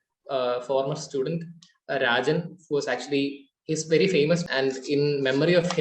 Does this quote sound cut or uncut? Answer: cut